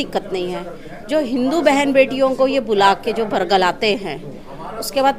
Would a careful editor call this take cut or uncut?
uncut